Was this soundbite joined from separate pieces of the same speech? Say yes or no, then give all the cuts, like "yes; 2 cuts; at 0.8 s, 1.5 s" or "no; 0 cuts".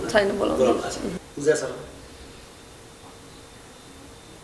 yes; 1 cut; at 1.2 s